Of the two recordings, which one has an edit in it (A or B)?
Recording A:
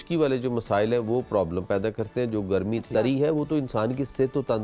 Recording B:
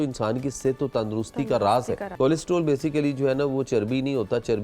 B